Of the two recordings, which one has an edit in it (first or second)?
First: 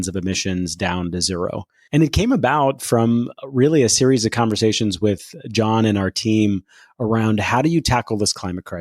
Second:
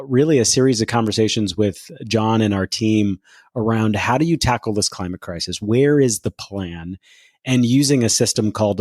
first